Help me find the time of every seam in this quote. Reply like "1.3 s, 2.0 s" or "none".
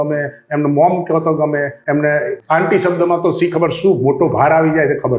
1.8 s, 2.4 s

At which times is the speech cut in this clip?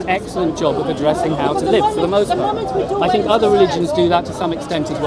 none

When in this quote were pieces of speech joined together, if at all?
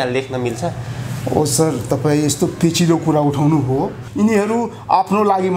4.0 s

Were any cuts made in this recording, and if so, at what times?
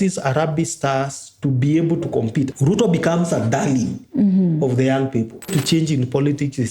5.5 s

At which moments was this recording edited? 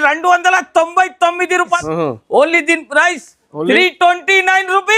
1.8 s

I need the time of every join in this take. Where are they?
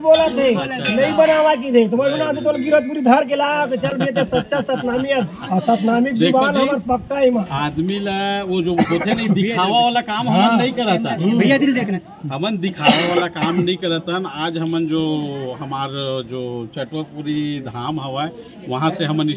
none

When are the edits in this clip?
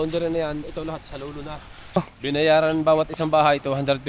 2.0 s

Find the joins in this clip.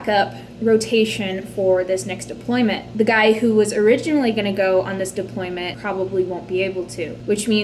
2.8 s, 5.8 s

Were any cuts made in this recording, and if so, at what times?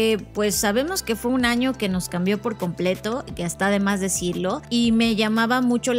4.6 s

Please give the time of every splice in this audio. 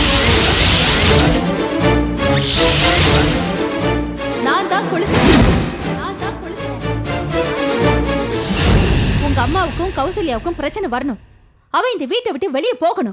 none

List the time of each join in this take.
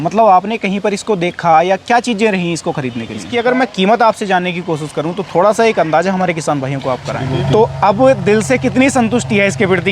3.2 s, 7.2 s

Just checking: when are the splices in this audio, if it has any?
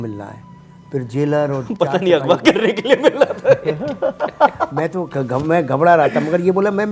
none

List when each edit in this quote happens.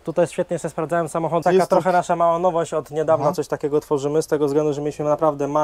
1.4 s

